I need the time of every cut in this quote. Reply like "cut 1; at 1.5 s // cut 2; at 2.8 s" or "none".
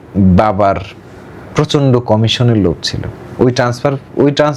none